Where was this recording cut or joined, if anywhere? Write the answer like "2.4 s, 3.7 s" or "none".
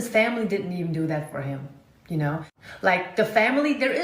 2.9 s